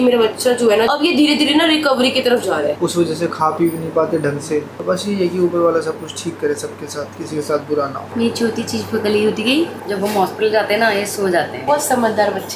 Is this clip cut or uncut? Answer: cut